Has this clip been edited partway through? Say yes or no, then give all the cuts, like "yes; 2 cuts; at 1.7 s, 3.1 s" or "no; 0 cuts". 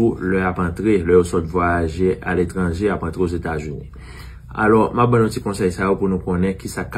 no; 0 cuts